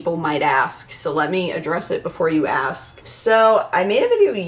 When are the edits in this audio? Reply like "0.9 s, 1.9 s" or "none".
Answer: none